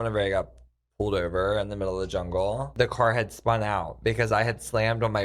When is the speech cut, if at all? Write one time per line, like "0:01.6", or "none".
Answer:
0:02.7